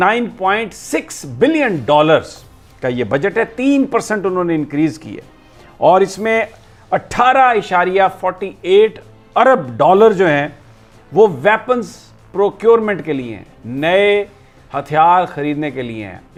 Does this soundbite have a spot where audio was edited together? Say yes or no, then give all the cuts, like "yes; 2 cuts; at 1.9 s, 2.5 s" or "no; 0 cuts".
no; 0 cuts